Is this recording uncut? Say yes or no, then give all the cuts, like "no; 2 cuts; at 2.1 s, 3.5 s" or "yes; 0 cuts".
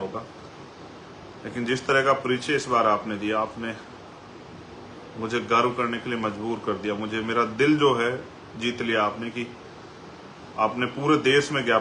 yes; 0 cuts